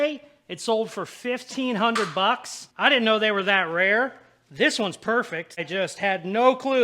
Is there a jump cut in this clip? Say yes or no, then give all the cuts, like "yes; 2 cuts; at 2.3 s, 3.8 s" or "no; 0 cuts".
yes; 1 cut; at 5.6 s